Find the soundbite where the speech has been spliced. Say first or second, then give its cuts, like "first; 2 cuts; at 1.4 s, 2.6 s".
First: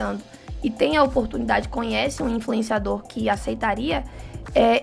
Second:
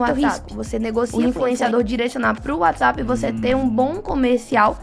second; 1 cut; at 1.1 s